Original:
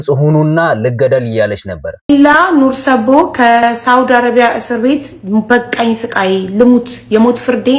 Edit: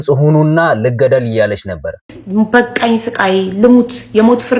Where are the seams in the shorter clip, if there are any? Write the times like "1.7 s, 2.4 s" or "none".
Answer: 2.0 s